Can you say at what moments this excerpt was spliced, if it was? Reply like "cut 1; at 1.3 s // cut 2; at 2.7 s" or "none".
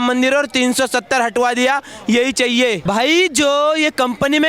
cut 1; at 2.8 s